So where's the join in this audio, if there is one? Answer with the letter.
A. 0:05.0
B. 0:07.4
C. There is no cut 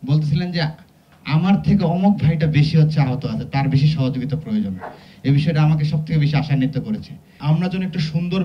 B